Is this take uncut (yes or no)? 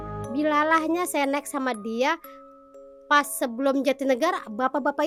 yes